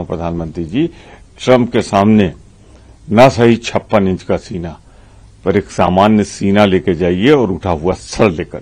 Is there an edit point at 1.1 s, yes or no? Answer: no